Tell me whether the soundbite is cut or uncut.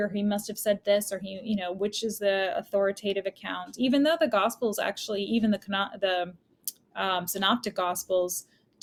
uncut